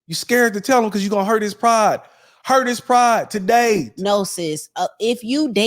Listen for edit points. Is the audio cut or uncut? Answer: cut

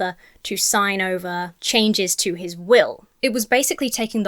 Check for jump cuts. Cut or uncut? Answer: cut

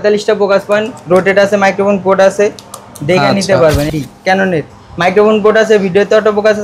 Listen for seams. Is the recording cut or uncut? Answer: cut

